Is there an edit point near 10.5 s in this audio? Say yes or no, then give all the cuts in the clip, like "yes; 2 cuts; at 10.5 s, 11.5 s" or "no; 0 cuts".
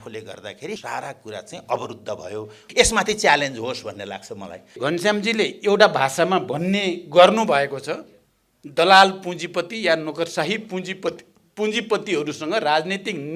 no; 3 cuts; at 0.8 s, 2.7 s, 4.8 s